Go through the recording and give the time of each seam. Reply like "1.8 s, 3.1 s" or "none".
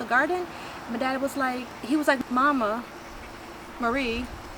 2.1 s